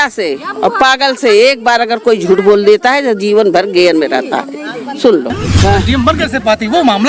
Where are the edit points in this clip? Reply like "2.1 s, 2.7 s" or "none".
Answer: 5.4 s